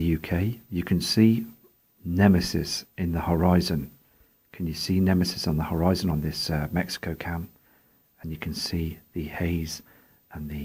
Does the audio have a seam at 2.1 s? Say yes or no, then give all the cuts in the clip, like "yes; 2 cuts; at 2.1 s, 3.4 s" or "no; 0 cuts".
no; 0 cuts